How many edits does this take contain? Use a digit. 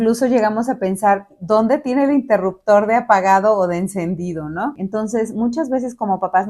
1